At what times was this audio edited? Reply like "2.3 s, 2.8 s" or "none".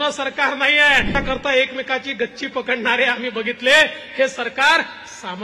1.1 s